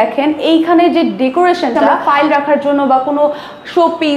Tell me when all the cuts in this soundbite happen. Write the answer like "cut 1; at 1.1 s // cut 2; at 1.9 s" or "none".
cut 1; at 1.9 s